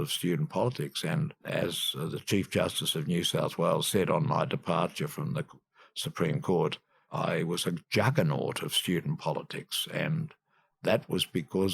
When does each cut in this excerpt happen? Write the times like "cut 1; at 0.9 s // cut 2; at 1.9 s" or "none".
cut 1; at 1.4 s // cut 2; at 7.0 s